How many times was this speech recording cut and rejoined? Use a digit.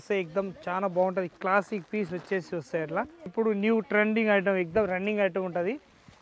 1